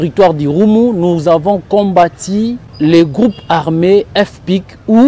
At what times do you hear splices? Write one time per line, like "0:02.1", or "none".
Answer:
0:02.6